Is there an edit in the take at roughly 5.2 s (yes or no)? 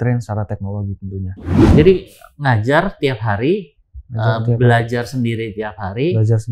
no